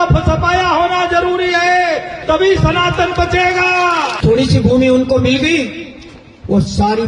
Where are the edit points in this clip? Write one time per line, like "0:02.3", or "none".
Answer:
0:04.1